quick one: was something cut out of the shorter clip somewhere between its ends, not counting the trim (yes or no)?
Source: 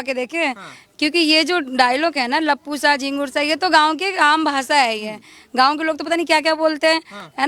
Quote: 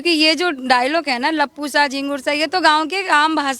no